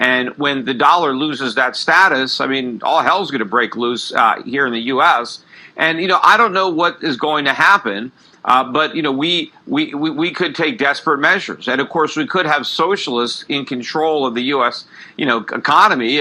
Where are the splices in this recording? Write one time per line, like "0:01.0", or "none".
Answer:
0:04.1